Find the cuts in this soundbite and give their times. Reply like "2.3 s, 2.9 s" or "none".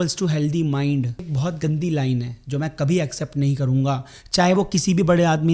1.3 s